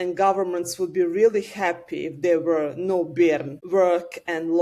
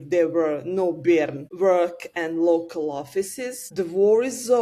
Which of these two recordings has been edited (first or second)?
second